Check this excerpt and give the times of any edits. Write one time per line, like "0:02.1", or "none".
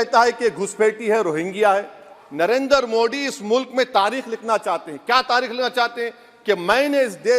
0:02.2